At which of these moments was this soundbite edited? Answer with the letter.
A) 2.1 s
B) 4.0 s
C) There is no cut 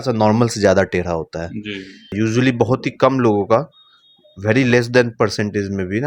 A